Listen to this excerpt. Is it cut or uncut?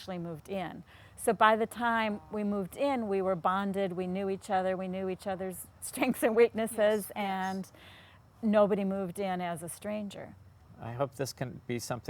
cut